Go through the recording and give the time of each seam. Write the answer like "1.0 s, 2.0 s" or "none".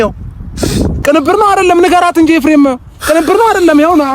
0.9 s